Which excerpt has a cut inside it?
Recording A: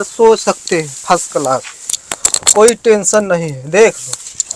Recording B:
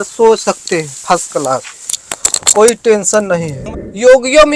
B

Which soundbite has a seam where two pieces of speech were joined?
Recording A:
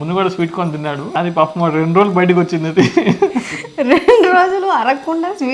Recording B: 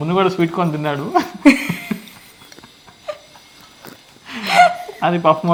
A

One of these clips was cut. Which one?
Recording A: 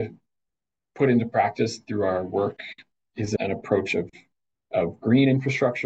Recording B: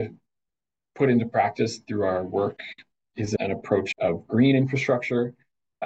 B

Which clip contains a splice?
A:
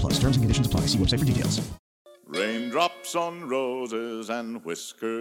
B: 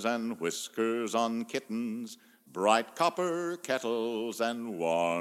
A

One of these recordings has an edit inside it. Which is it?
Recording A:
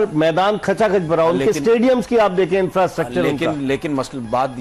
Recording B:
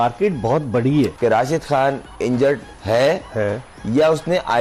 B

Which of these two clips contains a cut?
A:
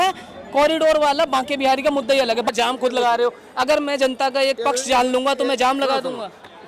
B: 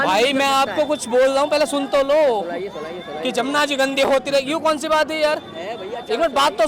A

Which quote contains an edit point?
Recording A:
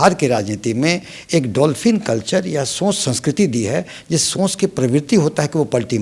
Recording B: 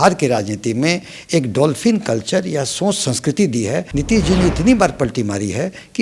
B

